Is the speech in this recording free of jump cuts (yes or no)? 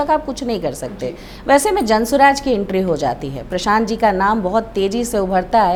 yes